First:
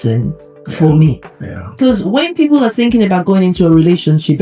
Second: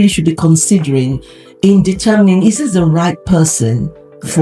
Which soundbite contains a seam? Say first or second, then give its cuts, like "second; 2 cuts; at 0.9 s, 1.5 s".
first; 1 cut; at 1.8 s